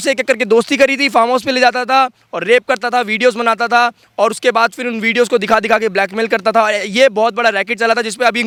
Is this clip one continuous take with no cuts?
yes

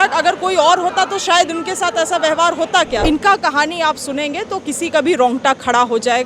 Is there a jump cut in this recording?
yes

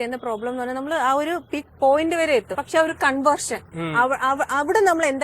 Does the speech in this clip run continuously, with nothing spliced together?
no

